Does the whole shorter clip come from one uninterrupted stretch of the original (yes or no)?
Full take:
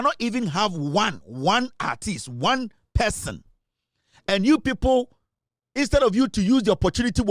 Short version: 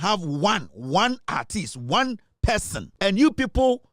no